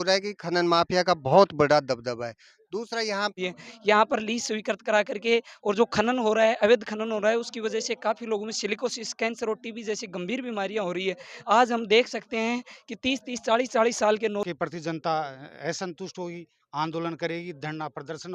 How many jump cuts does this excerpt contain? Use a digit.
2